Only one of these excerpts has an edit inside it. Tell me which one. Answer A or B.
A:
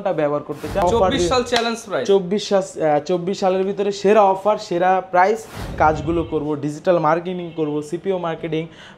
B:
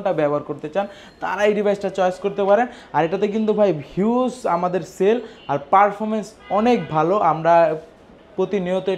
A